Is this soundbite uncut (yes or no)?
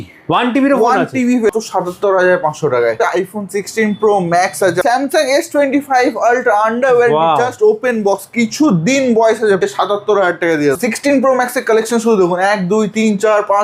no